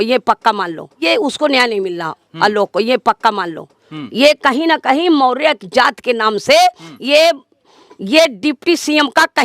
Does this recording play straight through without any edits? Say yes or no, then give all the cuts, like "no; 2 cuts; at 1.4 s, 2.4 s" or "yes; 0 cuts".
yes; 0 cuts